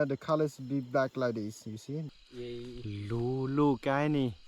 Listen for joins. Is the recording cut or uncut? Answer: cut